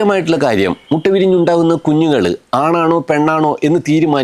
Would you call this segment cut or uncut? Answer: uncut